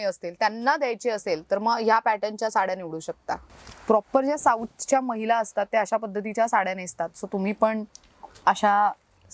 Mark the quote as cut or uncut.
cut